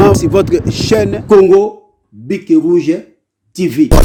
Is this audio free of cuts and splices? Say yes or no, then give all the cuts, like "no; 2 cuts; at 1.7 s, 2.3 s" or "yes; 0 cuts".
yes; 0 cuts